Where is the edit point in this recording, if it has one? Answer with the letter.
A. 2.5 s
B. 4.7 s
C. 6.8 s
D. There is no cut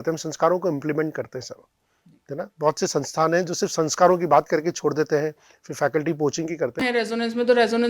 C